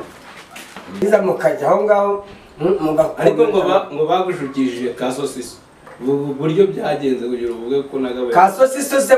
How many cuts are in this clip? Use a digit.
1